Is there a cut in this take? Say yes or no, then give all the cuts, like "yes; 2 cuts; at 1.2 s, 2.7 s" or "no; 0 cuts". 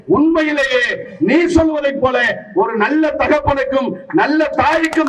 no; 0 cuts